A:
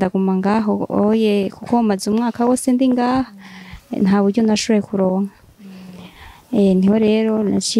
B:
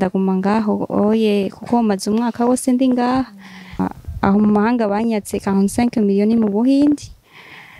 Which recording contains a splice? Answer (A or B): B